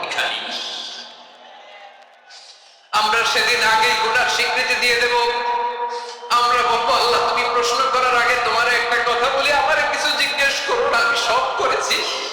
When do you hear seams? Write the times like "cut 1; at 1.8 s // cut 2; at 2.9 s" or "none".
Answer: none